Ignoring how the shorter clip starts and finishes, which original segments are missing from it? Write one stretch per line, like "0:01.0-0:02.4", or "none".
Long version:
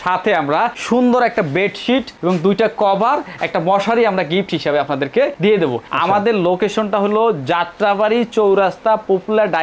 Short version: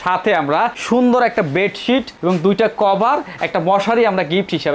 none